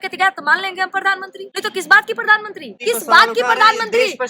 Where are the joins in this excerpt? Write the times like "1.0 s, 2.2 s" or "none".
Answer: 1.4 s, 2.8 s